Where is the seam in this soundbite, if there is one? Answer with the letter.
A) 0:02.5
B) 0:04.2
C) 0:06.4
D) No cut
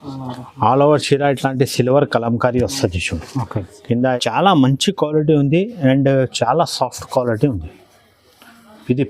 B